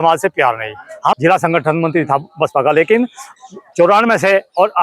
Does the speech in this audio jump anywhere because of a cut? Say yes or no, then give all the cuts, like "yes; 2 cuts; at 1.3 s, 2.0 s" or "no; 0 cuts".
yes; 1 cut; at 1.2 s